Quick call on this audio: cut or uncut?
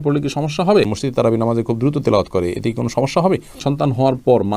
cut